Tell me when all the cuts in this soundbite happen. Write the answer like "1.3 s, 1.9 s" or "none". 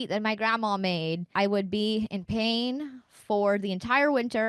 1.3 s